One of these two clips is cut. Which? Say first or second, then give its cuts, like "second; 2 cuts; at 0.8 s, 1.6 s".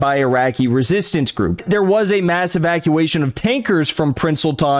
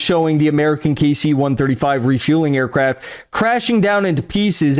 first; 1 cut; at 1.6 s